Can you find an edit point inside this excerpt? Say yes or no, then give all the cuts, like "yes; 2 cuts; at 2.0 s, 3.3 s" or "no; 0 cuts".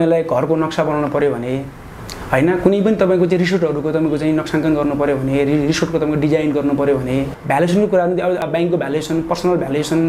yes; 2 cuts; at 7.4 s, 8.4 s